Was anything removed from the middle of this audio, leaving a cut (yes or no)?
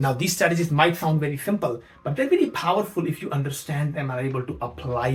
no